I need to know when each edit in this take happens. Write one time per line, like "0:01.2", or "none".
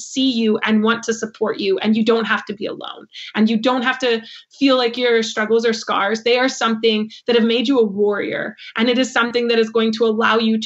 none